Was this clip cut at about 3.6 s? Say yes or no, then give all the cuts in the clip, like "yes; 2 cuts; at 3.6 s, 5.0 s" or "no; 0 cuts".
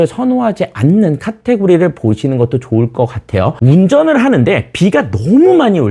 yes; 1 cut; at 3.6 s